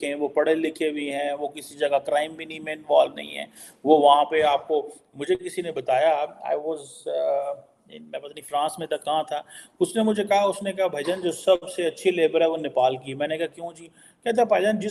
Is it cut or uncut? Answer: uncut